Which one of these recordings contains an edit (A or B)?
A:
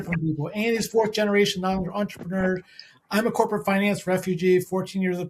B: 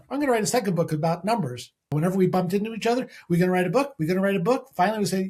B